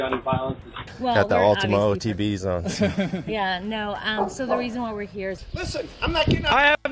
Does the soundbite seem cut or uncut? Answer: cut